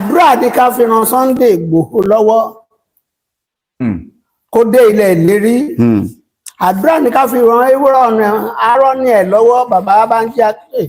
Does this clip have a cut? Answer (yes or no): no